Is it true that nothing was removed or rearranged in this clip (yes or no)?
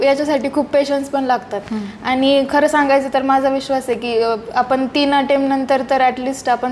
yes